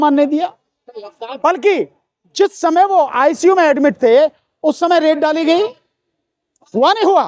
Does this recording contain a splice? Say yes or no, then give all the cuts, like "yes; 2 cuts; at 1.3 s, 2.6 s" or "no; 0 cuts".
no; 0 cuts